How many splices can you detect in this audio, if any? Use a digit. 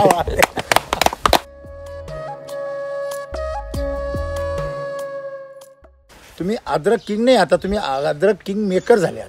2